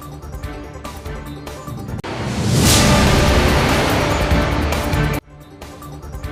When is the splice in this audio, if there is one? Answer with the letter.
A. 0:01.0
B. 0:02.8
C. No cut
C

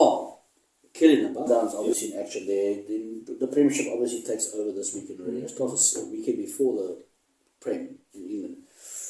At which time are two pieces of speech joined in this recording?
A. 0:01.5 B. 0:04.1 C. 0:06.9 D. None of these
A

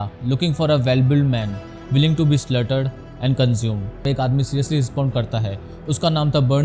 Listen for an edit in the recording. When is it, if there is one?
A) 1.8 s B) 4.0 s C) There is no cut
B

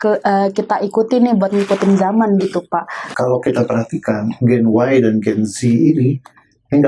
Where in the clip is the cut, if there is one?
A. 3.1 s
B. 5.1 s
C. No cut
A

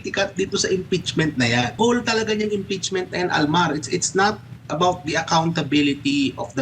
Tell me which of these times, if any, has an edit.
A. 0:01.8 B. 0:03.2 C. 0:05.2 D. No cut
A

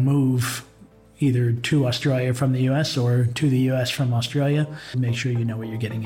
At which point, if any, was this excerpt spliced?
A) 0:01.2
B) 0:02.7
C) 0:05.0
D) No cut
C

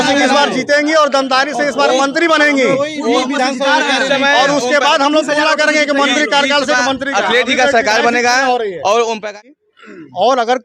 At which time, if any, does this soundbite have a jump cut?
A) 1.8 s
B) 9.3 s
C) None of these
B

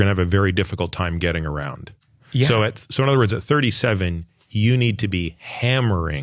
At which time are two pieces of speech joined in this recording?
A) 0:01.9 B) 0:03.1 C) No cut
C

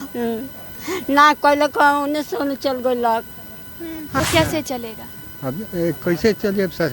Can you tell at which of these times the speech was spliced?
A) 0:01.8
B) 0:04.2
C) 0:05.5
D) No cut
B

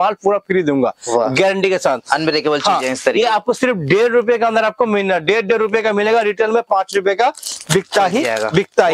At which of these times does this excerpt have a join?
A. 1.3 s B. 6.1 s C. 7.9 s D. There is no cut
D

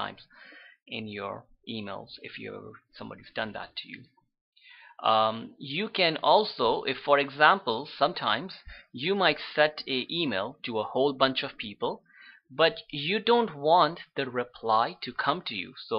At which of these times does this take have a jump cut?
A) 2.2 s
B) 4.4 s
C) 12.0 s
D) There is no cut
A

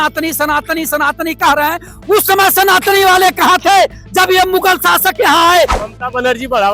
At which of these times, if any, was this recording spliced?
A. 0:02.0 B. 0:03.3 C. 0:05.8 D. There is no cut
C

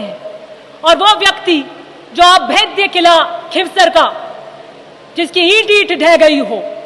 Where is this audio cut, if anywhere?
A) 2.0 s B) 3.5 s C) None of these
C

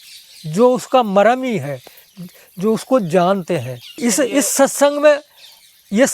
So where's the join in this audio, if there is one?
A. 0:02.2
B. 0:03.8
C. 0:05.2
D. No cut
B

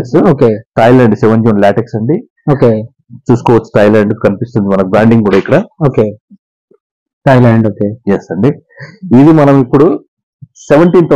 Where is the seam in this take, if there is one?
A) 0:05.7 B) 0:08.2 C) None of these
C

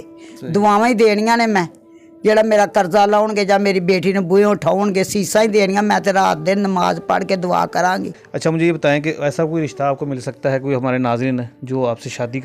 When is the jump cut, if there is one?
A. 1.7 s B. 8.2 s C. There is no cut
B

